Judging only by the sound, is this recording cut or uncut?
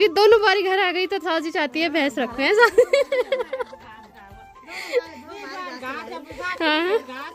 uncut